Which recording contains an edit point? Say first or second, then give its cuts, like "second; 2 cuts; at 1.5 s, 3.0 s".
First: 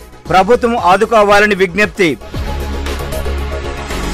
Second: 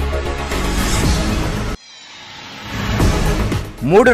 second; 2 cuts; at 1.9 s, 3.4 s